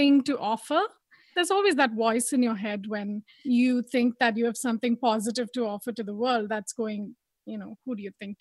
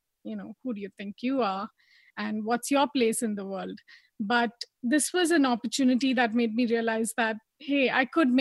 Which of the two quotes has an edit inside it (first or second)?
first